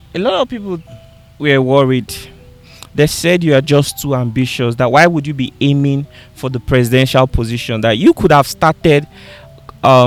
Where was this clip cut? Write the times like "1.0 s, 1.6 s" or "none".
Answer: none